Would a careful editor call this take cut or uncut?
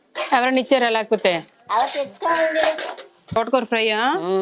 cut